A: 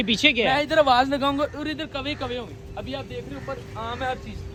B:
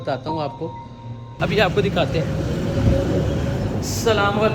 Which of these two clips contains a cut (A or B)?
B